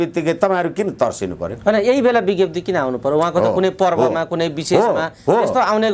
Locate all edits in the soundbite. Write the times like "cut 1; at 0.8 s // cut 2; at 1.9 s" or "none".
none